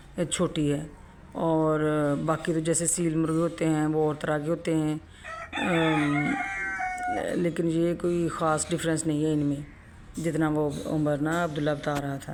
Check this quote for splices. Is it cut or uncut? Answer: uncut